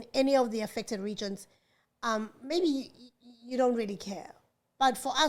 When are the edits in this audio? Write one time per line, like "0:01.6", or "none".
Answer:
none

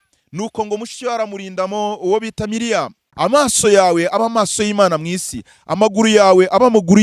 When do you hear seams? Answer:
0:03.0

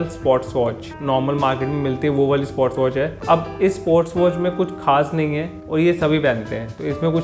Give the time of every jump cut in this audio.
none

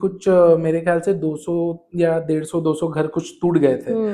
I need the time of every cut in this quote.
none

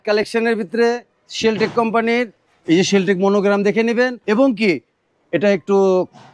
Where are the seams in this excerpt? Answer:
0:04.2

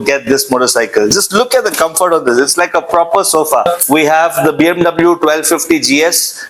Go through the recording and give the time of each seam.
0:03.6

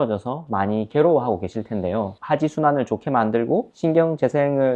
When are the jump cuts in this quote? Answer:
0:02.2

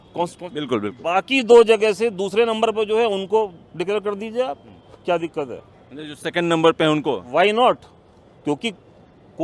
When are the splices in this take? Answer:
none

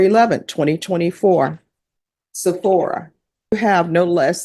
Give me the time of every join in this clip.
0:03.5

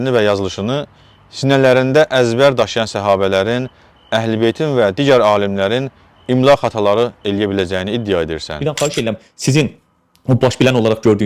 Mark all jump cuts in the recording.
0:08.5

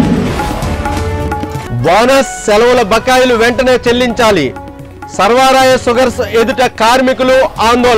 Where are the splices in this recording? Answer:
0:01.6

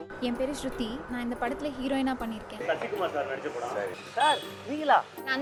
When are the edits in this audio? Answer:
none

